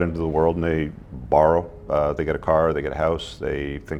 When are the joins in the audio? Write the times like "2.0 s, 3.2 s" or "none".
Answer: none